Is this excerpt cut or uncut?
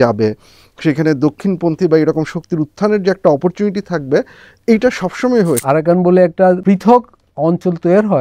cut